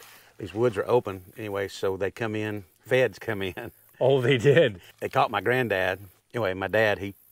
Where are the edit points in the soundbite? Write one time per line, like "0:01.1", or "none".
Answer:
0:02.7
0:04.9
0:06.1

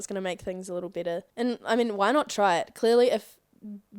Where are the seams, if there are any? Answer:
0:01.3

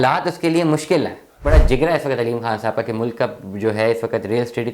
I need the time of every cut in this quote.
0:01.4

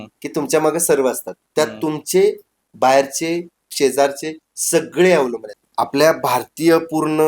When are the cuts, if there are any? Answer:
0:05.5

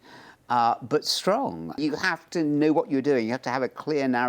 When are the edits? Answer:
0:01.8

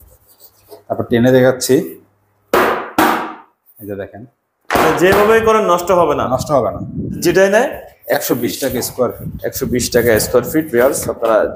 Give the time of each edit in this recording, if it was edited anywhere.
0:07.2

